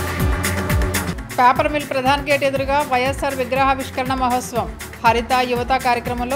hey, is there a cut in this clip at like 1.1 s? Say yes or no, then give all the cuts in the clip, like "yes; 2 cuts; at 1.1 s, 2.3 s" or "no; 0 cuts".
yes; 1 cut; at 1.1 s